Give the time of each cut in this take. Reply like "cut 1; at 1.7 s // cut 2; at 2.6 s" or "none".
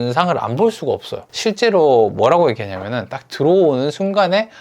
cut 1; at 1.3 s